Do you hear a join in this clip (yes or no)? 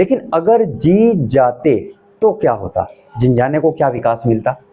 no